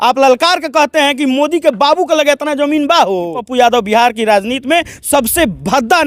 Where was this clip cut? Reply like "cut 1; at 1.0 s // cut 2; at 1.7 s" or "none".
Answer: cut 1; at 3.4 s